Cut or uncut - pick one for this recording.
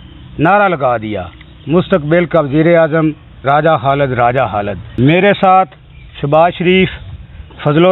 cut